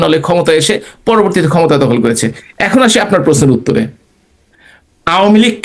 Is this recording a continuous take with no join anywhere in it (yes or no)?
yes